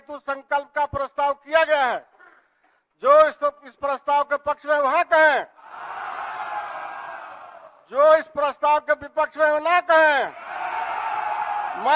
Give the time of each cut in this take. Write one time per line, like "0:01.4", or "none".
none